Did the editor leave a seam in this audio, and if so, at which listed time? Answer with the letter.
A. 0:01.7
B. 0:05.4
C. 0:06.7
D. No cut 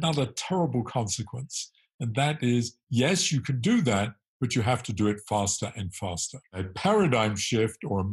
C